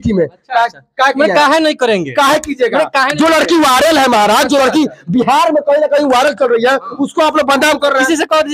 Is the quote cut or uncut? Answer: uncut